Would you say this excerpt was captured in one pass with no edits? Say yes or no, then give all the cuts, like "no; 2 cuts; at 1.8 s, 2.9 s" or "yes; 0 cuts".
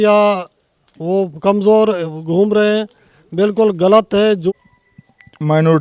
no; 1 cut; at 4.5 s